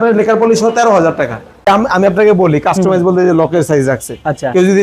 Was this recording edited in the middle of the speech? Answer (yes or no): yes